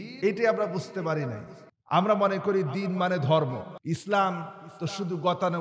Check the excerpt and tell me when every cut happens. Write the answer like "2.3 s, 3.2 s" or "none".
3.7 s